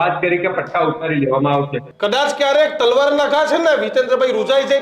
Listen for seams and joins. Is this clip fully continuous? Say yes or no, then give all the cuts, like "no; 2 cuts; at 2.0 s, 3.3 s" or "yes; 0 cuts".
no; 1 cut; at 1.8 s